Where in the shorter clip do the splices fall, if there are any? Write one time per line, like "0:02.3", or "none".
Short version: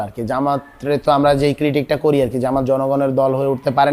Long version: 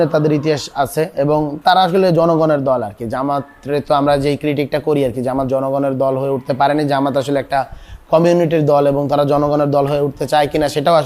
none